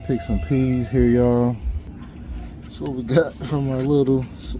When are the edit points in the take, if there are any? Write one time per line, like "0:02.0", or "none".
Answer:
0:01.9